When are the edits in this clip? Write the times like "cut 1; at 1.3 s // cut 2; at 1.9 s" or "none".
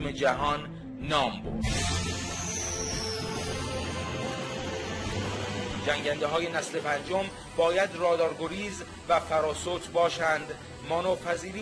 cut 1; at 2.9 s